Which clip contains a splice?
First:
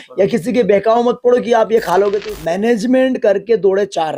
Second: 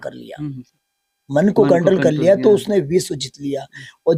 first; 1 cut; at 2.1 s

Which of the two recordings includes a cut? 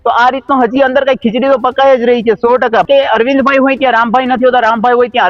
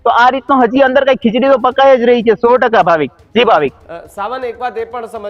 first; 1 cut; at 2.8 s

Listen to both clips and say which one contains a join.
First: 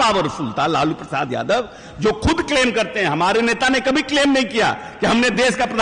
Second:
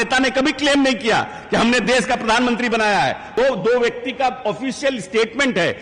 second; 1 cut; at 3.4 s

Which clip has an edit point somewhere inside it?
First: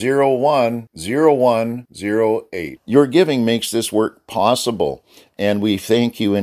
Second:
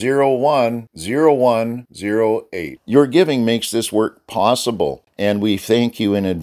second; 1 cut; at 5.0 s

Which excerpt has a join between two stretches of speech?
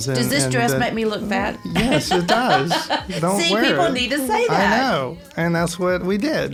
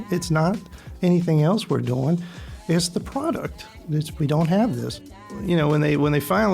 second; 2 cuts; at 3.8 s, 5.3 s

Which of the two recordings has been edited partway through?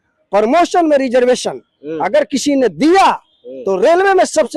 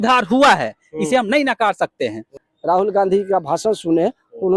second; 1 cut; at 2.5 s

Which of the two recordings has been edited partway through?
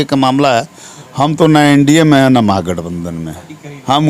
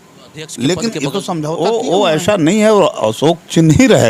second; 1 cut; at 1.6 s

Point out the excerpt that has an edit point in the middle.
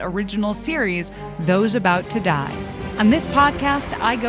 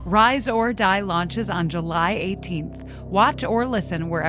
first; 1 cut; at 2.8 s

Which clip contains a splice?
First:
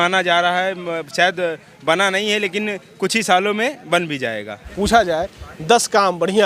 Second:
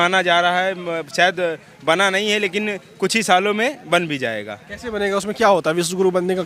first; 1 cut; at 4.6 s

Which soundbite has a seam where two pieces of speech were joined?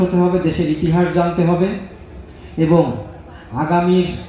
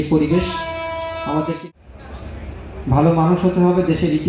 second; 1 cut; at 1.6 s

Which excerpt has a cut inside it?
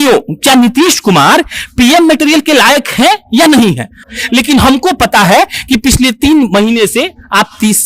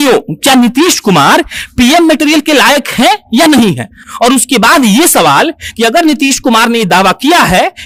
first; 1 cut; at 4.1 s

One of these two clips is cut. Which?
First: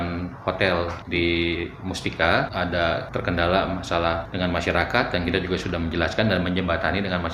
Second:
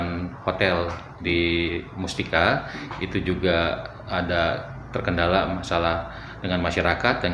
first; 3 cuts; at 1.0 s, 2.9 s, 4.3 s

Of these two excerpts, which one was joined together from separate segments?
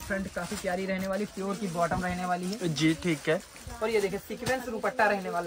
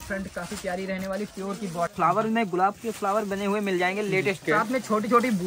second; 2 cuts; at 1.9 s, 4.4 s

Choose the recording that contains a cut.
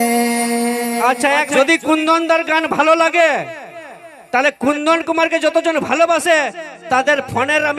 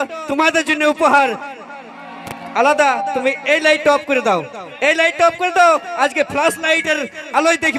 first; 1 cut; at 1.5 s

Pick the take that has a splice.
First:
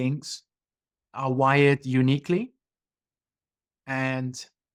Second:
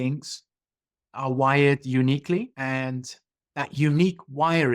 second; 1 cut; at 2.5 s

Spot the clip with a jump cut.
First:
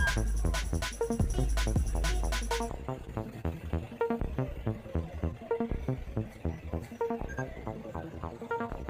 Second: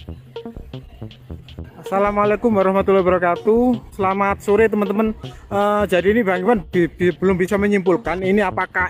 second; 1 cut; at 1.9 s

